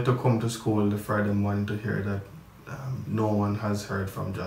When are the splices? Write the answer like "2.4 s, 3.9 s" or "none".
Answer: none